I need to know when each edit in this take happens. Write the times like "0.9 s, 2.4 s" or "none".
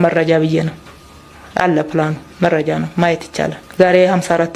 3.6 s